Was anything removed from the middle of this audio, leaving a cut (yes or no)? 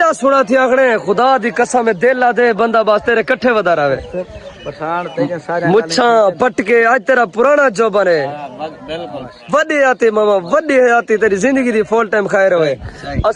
no